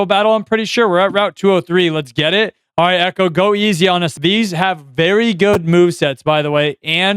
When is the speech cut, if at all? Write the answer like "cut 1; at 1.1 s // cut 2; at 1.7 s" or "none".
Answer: cut 1; at 2.6 s // cut 2; at 4.1 s